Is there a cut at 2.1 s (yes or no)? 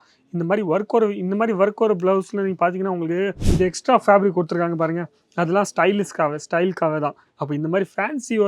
no